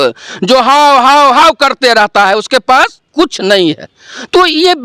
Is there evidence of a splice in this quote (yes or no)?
no